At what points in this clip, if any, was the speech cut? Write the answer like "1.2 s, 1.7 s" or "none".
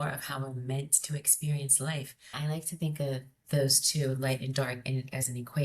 2.3 s

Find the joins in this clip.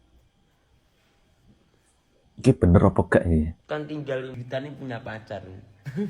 4.4 s

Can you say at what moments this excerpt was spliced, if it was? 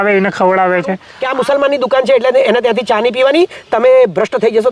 1.1 s

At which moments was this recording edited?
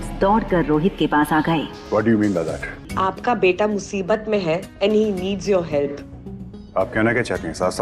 2.9 s

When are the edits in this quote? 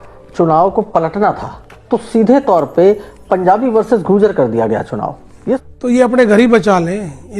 5.5 s

